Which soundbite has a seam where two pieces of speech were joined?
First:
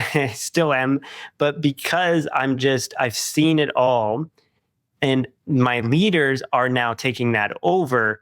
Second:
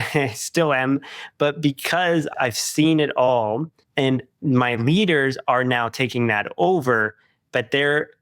second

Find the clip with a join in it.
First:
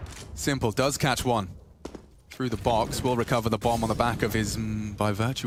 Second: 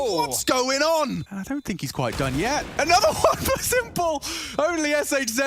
second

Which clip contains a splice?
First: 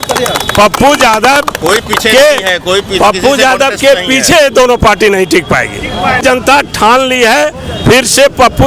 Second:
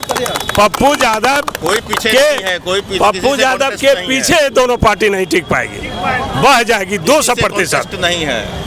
first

